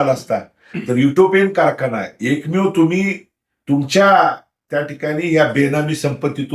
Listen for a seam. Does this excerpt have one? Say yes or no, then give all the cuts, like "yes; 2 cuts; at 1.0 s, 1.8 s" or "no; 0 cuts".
no; 0 cuts